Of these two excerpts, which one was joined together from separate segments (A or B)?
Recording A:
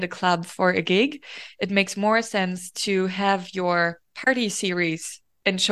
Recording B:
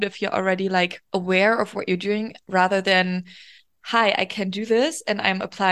B